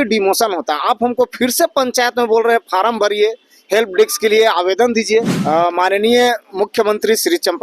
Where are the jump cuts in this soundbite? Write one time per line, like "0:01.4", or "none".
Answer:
0:05.4